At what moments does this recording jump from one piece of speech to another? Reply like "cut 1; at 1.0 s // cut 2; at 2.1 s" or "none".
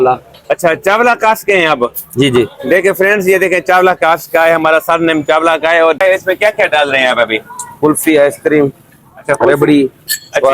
cut 1; at 6.0 s